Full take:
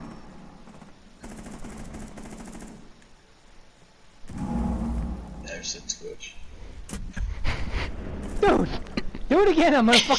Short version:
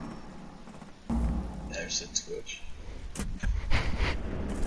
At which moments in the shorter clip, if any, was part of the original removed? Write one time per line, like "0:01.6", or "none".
0:01.1